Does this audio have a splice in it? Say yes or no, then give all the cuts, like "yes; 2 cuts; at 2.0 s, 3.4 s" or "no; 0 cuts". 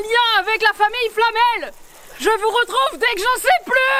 no; 0 cuts